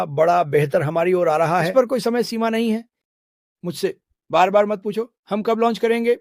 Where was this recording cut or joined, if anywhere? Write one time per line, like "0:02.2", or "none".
0:01.7